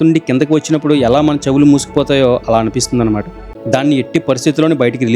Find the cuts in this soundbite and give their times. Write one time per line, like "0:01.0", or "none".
0:03.4

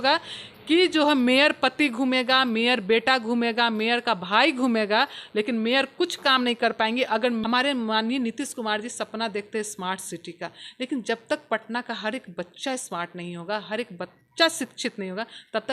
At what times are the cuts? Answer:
0:07.4

